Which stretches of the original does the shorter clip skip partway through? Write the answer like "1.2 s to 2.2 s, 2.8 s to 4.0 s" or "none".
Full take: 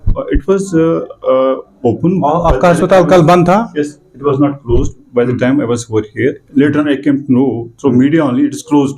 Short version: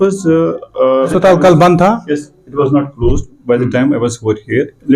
1.6 s to 2.8 s